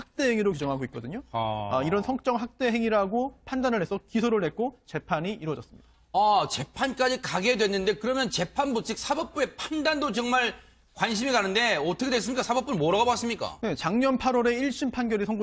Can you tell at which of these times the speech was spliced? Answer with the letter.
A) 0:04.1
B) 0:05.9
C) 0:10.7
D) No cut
B